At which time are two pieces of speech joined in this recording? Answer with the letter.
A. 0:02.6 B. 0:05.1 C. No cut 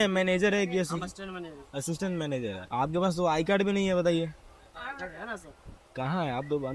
A